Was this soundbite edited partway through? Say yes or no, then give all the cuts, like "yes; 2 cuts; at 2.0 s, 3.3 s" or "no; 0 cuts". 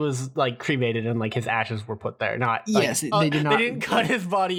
no; 0 cuts